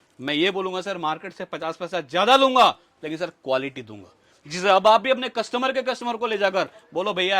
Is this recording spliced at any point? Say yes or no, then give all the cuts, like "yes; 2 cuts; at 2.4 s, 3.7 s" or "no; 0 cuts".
no; 0 cuts